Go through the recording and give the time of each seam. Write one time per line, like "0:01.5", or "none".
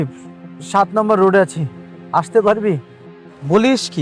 none